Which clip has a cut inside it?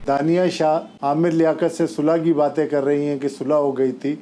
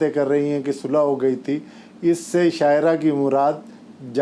first; 1 cut; at 0.9 s

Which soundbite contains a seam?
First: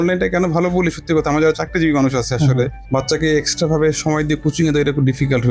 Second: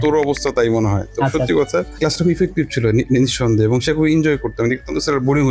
second; 1 cut; at 2.0 s

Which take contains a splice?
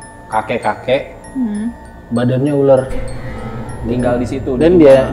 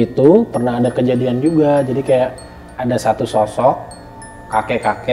second; 1 cut; at 2.7 s

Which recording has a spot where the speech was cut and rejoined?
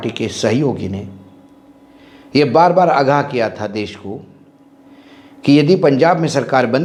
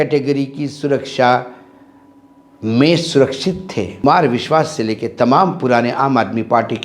second; 1 cut; at 4.0 s

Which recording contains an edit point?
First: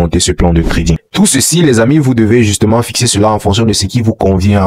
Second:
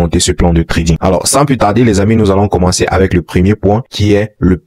first; 1 cut; at 1.0 s

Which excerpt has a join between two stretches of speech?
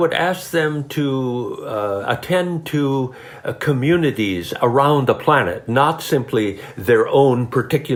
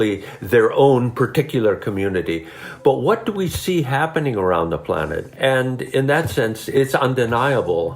second; 2 cuts; at 5.2 s, 6.8 s

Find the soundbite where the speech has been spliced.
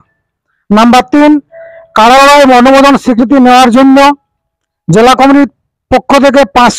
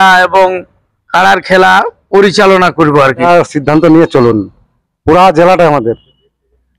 second; 1 cut; at 3.3 s

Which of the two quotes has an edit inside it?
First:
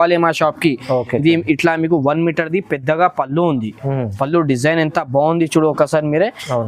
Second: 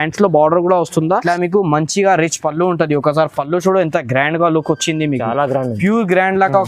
second; 1 cut; at 1.3 s

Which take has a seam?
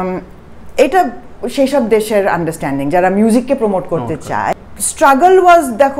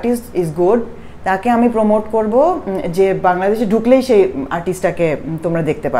first; 1 cut; at 4.5 s

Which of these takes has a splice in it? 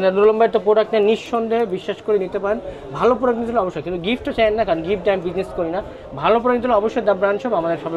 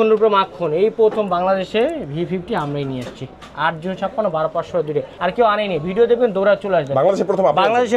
second; 1 cut; at 5.1 s

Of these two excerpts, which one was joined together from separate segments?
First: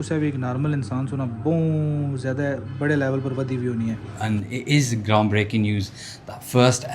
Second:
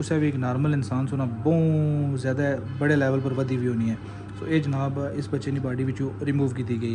first; 1 cut; at 4.1 s

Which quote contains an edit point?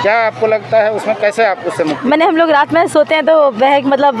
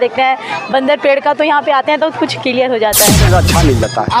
second; 1 cut; at 3.2 s

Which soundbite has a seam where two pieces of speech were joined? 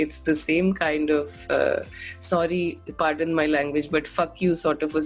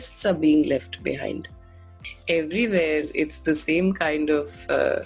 second; 1 cut; at 2.0 s

